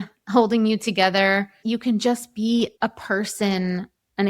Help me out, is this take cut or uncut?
cut